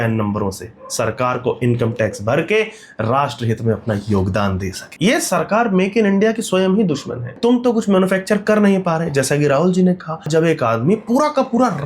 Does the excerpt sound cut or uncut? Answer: cut